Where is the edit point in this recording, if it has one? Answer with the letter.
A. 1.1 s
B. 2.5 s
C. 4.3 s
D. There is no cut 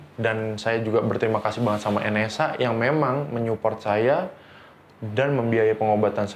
D